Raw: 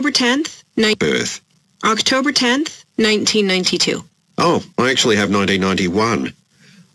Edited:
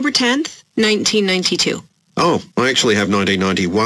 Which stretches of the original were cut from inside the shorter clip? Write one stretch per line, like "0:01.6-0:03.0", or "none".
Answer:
0:00.9-0:03.1